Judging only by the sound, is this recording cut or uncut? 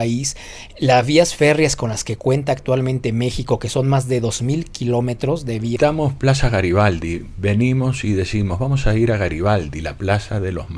cut